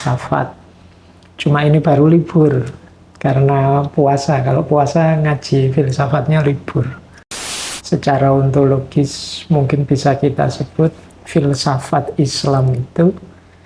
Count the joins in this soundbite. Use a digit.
1